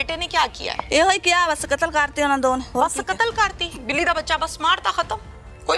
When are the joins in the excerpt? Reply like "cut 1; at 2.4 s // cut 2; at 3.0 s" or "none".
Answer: cut 1; at 0.8 s // cut 2; at 2.7 s